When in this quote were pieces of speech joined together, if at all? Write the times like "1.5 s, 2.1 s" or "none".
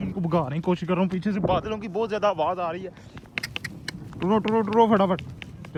none